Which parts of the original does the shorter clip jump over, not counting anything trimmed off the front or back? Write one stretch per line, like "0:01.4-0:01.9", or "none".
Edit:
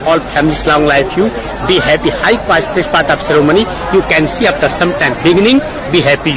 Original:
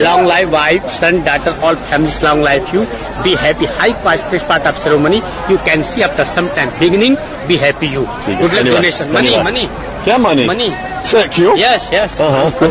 none